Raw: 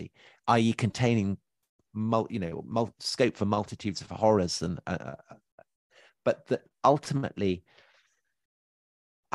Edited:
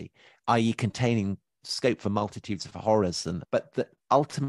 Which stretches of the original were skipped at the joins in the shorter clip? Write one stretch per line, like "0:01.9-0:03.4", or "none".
0:01.7-0:03.0
0:04.8-0:06.1